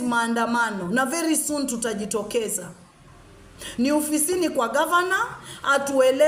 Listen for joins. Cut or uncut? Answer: uncut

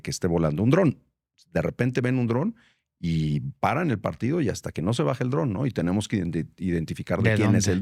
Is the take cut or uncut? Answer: uncut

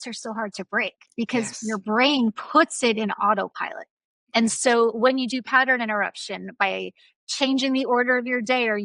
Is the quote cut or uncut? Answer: uncut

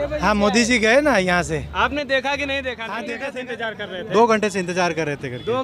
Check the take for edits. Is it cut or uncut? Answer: cut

